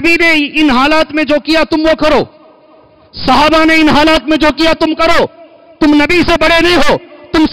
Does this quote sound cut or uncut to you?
uncut